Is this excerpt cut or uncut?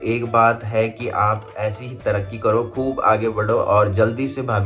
uncut